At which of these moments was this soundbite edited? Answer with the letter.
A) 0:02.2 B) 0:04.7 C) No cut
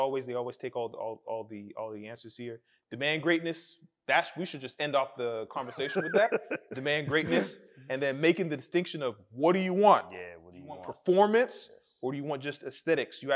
C